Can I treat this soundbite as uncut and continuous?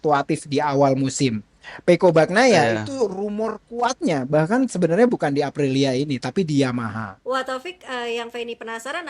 no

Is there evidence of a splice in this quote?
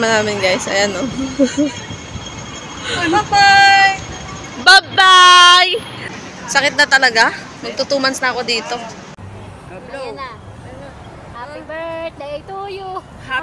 yes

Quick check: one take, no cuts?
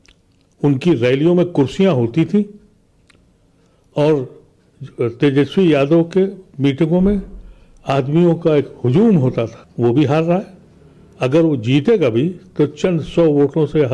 yes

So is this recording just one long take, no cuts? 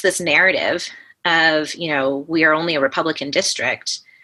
yes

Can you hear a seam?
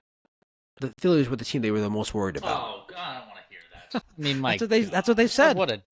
yes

